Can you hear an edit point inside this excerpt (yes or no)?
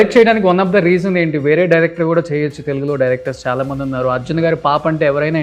no